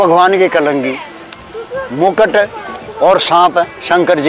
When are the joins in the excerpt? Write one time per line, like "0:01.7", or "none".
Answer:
0:01.4